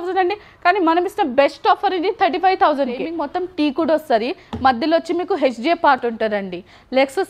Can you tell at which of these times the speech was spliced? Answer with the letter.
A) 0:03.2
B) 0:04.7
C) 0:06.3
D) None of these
A